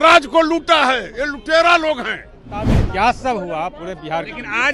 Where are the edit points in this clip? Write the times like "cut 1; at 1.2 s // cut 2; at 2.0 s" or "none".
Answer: cut 1; at 2.8 s